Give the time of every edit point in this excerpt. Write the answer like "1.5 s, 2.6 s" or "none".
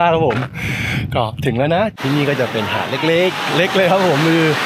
1.9 s